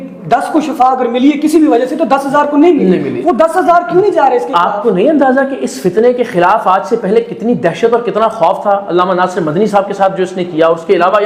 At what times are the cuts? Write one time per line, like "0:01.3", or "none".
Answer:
none